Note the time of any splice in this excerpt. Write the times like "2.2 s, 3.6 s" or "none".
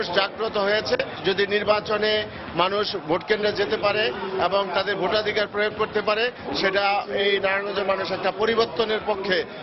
none